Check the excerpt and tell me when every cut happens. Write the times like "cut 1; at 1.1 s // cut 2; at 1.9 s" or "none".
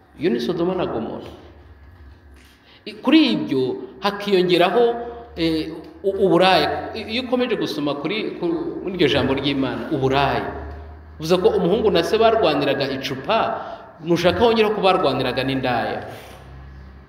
none